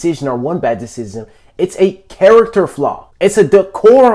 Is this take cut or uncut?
cut